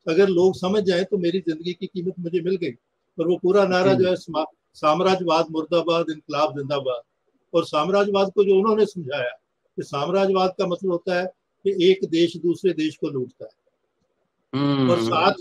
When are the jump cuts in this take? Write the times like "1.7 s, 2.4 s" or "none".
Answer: none